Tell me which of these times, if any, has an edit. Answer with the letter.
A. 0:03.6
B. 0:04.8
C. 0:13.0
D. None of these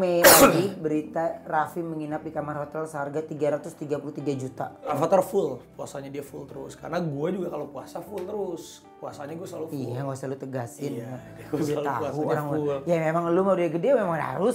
B